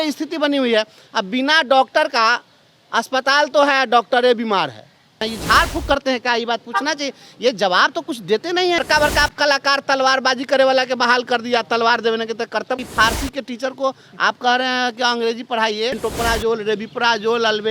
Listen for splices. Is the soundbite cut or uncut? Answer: cut